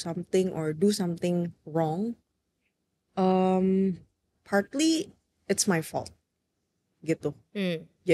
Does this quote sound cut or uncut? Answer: uncut